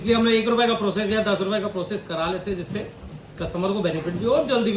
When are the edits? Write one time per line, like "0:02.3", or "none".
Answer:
none